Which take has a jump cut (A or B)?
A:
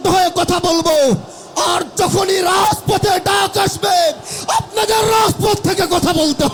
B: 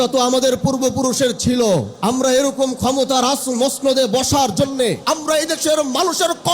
B